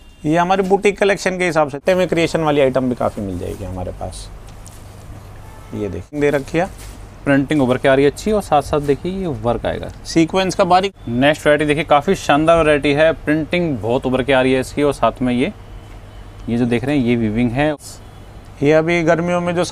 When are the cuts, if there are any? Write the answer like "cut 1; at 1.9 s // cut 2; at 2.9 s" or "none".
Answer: cut 1; at 1.8 s // cut 2; at 6.2 s // cut 3; at 10.9 s // cut 4; at 17.7 s